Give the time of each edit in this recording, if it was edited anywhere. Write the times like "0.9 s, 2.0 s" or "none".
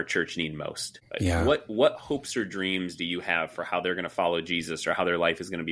1.3 s

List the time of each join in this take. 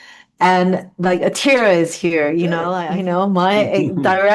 2.8 s

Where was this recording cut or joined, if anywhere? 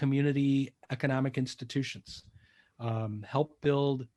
none

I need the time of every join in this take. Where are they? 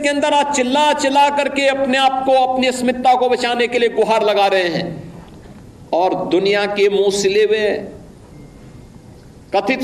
none

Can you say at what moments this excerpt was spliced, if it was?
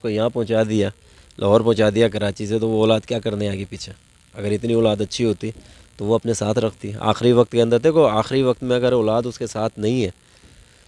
none

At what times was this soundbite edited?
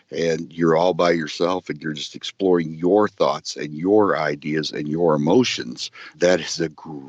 6.1 s

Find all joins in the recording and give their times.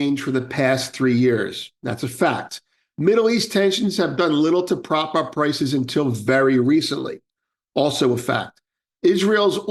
none

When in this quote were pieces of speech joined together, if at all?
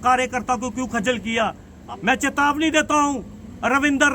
1.7 s

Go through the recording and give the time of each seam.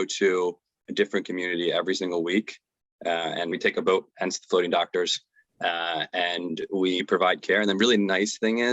3.5 s, 7.0 s

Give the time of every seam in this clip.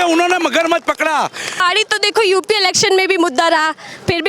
1.6 s

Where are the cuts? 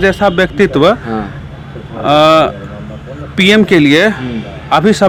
none

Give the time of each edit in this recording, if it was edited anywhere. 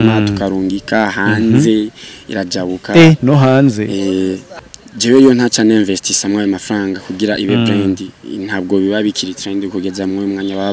4.5 s

